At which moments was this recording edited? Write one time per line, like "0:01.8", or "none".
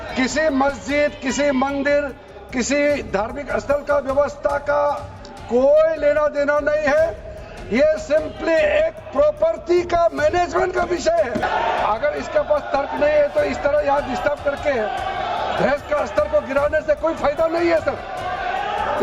0:11.4